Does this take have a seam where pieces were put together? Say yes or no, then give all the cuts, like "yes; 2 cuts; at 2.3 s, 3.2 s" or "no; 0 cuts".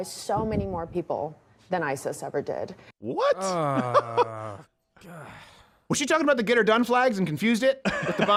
no; 0 cuts